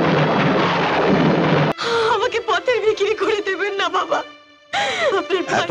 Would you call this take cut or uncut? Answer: cut